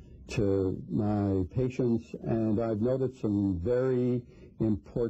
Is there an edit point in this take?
no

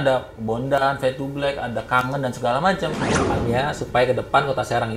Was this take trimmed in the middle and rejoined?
yes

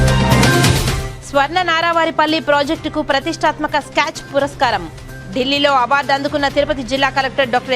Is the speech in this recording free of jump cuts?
no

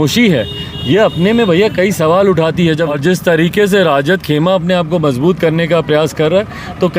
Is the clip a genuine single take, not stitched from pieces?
no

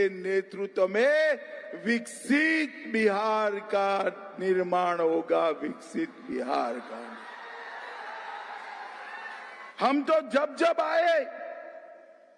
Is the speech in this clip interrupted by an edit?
no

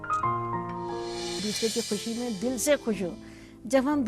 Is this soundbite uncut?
no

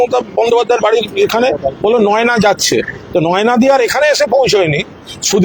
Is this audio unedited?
yes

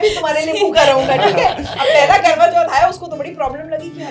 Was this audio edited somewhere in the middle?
no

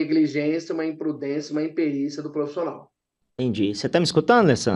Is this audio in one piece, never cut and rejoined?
yes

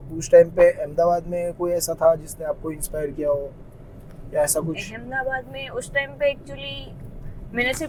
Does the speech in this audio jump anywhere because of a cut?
no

